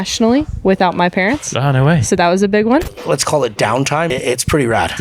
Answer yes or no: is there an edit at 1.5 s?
no